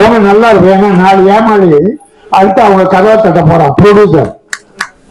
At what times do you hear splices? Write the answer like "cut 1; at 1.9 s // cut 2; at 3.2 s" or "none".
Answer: none